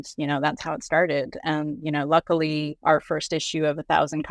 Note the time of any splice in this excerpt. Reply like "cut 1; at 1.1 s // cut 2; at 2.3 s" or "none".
cut 1; at 2.7 s

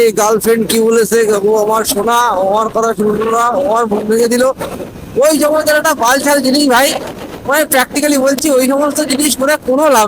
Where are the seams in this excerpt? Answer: none

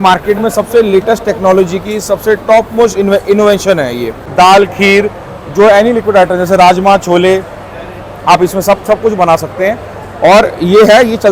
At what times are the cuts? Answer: cut 1; at 4.2 s

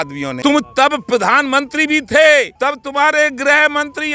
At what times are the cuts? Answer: cut 1; at 2.5 s

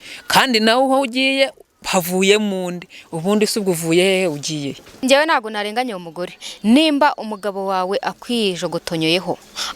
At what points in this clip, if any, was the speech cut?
cut 1; at 4.9 s

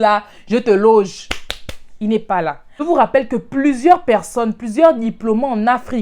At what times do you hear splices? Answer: cut 1; at 2.7 s

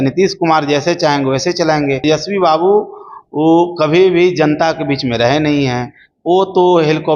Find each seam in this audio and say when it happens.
cut 1; at 2.0 s

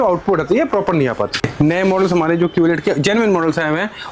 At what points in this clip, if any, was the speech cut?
cut 1; at 1.4 s

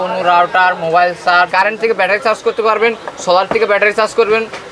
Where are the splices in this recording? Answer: cut 1; at 1.5 s

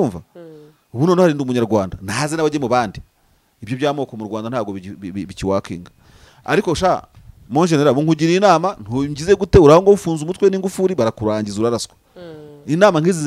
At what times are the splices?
none

